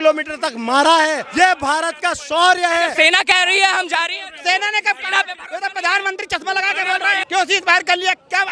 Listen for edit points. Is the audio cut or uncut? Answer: cut